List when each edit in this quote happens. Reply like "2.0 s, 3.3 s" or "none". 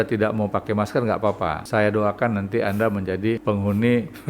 1.6 s, 3.4 s